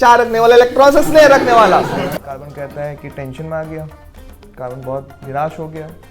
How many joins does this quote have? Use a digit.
1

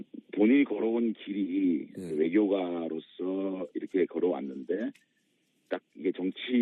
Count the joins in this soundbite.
0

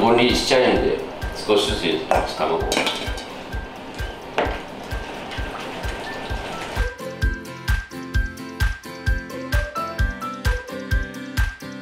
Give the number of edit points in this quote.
0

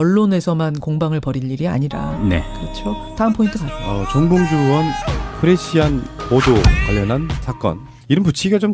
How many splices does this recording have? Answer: 0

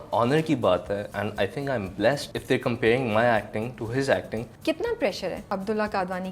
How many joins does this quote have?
4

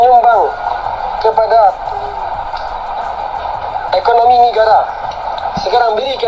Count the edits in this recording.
0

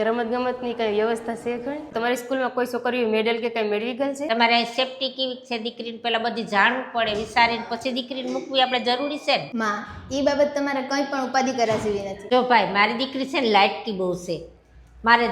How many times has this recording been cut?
3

